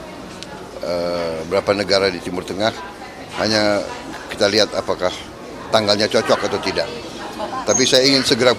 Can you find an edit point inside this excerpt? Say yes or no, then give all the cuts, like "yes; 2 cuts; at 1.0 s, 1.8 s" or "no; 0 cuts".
no; 0 cuts